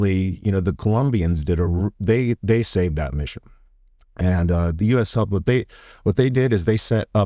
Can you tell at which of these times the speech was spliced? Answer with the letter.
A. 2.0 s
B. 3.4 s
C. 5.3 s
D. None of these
D